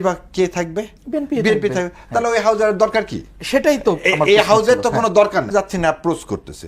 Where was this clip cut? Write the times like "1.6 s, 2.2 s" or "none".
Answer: 5.5 s